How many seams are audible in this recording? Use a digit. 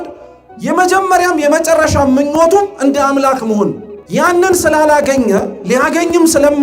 1